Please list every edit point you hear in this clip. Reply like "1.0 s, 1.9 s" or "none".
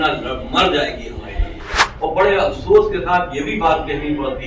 1.8 s